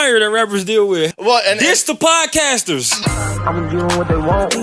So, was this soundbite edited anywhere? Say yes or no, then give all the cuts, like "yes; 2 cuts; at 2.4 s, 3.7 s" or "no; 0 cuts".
yes; 2 cuts; at 1.1 s, 2.9 s